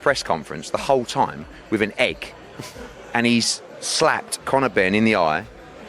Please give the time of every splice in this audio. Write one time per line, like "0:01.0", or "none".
none